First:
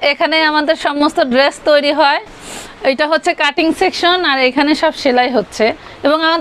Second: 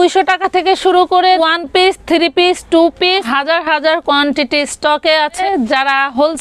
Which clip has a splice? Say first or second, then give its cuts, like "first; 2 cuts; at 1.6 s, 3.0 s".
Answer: second; 3 cuts; at 1.4 s, 3.3 s, 5.4 s